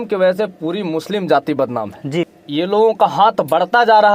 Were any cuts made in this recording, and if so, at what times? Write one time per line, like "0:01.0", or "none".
0:02.3